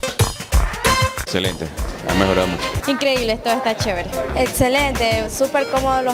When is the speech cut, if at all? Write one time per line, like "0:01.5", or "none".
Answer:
0:01.2